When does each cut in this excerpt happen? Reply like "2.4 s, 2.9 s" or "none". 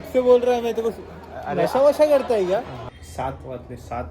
2.8 s

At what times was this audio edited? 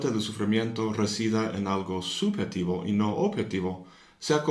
none

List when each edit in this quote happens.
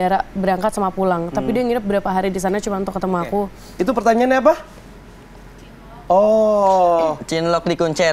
3.6 s

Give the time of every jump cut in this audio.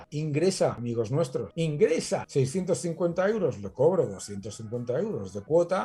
1.1 s, 2.3 s

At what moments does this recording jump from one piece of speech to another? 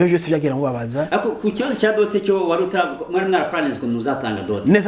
none

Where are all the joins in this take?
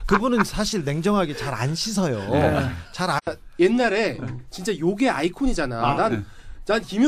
none

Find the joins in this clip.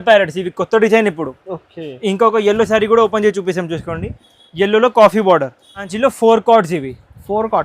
5.9 s

